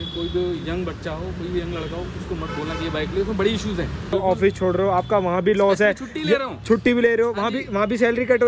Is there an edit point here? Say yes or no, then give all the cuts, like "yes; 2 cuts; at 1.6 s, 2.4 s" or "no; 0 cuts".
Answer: yes; 1 cut; at 4.1 s